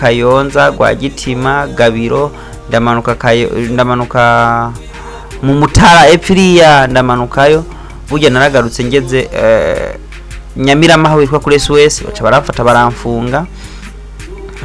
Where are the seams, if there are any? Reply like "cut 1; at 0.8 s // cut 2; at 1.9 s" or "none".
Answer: none